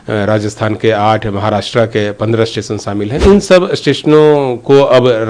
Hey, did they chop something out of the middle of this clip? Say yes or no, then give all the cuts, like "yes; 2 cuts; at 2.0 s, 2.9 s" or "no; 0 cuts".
yes; 1 cut; at 3.2 s